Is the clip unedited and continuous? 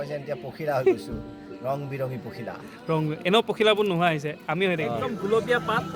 yes; 0 cuts

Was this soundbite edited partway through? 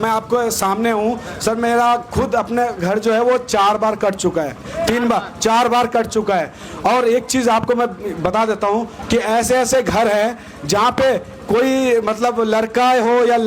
no; 0 cuts

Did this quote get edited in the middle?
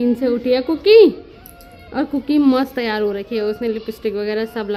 no; 0 cuts

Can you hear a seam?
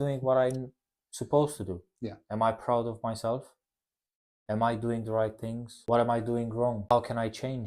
yes; 2 cuts; at 5.7 s, 6.9 s

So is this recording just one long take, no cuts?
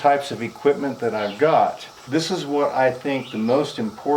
no; 1 cut; at 1.9 s

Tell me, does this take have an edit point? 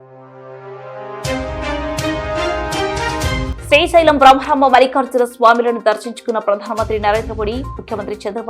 yes; 1 cut; at 2.3 s

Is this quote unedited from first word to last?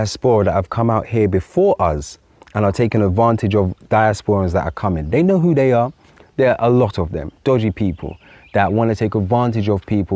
yes; 0 cuts

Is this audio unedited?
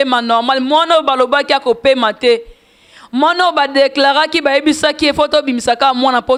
yes; 0 cuts

